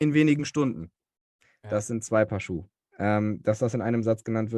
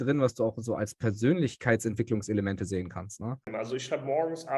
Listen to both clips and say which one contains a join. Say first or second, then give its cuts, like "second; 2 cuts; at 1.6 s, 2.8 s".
second; 1 cut; at 3.4 s